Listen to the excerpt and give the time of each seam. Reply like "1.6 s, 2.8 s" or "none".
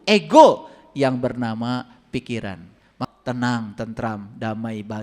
2.9 s